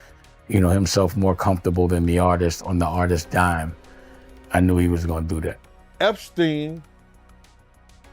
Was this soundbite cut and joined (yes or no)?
yes